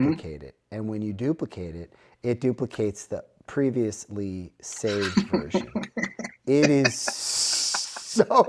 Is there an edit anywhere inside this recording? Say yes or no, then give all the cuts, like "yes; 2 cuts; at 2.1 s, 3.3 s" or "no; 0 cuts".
no; 0 cuts